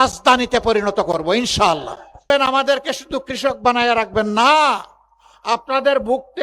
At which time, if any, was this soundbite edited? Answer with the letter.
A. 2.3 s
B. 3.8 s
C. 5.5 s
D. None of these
A